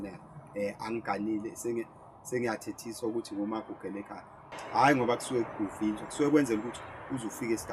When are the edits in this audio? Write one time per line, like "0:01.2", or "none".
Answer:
0:04.4

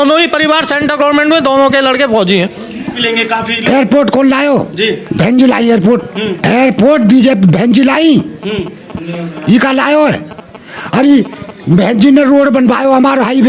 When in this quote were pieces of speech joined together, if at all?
0:03.0
0:06.4

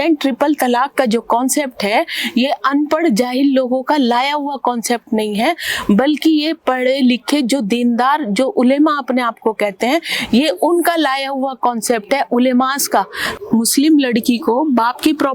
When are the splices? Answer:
0:13.3

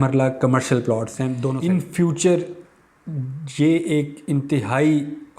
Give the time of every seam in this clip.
0:01.4

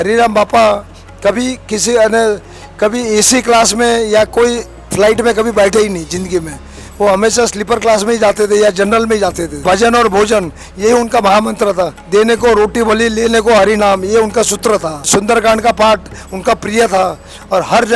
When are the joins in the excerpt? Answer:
0:09.6
0:12.0
0:15.0

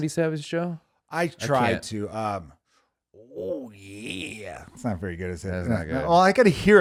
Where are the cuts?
none

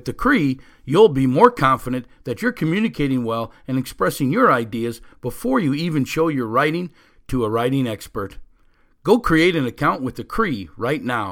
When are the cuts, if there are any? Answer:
none

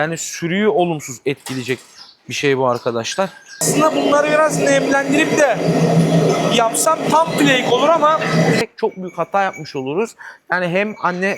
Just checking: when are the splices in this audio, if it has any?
0:03.6
0:08.6

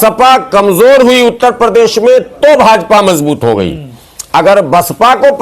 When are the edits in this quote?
none

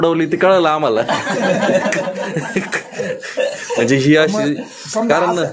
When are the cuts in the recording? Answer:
none

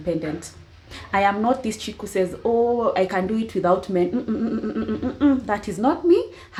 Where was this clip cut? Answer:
none

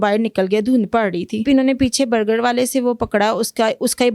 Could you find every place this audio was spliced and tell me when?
0:01.4

